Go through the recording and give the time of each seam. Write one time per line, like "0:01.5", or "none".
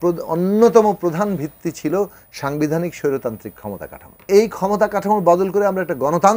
0:04.3